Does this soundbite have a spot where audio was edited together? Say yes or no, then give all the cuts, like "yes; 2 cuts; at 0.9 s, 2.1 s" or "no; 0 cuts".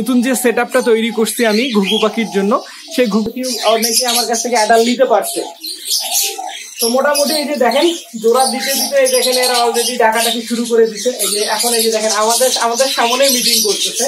yes; 1 cut; at 3.3 s